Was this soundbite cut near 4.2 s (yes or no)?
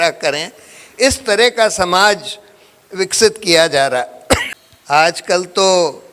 yes